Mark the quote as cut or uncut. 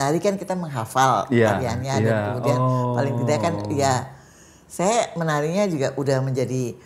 uncut